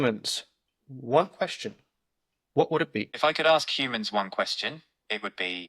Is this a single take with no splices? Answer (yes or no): no